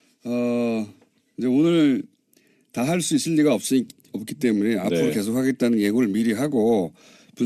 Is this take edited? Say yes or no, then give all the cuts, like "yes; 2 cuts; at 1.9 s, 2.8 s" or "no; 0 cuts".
yes; 1 cut; at 3.4 s